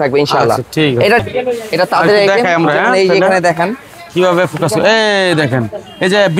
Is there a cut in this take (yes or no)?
yes